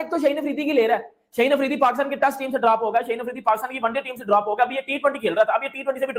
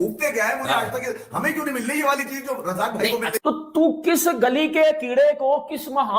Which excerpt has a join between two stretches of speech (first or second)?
second